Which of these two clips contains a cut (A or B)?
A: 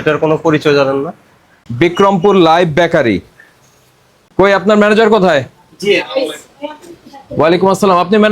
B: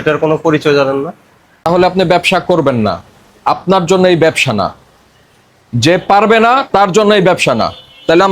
B